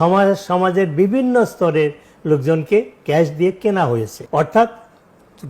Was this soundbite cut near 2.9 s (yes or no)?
no